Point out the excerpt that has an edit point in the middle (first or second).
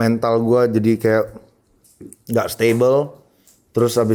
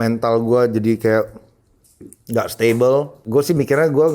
second